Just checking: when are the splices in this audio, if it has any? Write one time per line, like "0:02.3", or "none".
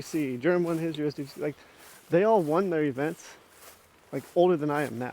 none

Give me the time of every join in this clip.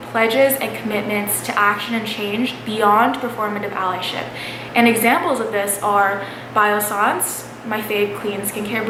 none

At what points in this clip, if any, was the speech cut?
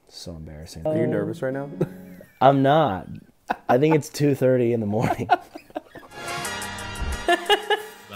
0:00.9
0:06.2

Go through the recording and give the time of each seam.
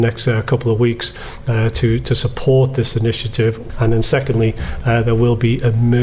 0:03.6

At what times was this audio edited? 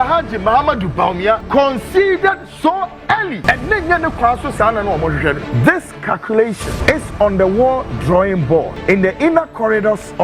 0:01.4
0:03.4
0:05.4
0:06.8
0:08.7

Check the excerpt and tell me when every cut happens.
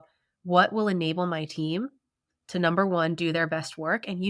none

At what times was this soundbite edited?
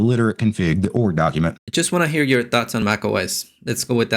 0:01.6

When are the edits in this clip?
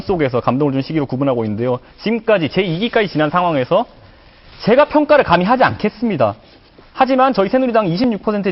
none

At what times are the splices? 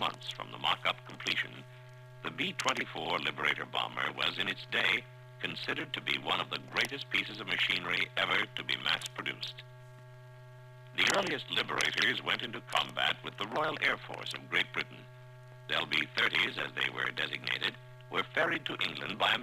0:17.6

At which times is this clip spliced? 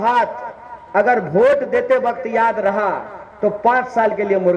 none

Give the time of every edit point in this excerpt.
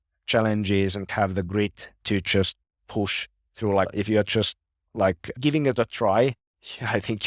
0:01.1
0:03.9
0:05.4

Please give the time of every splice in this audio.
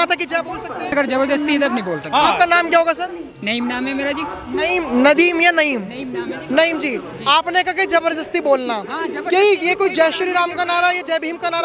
0:00.9

